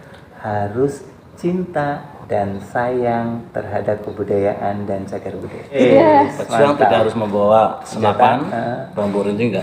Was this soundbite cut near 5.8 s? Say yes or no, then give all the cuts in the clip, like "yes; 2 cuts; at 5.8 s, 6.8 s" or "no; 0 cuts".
yes; 1 cut; at 5.8 s